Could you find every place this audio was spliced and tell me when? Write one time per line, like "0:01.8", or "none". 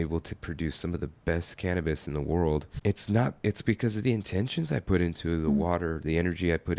none